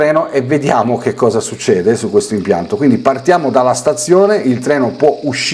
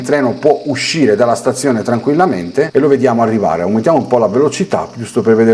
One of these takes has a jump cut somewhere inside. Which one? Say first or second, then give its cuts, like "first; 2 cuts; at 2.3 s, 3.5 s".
second; 1 cut; at 2.7 s